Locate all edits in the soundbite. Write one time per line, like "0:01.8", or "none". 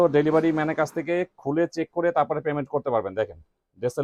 none